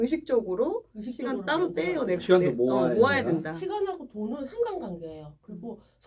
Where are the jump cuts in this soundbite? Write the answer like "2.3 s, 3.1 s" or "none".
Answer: none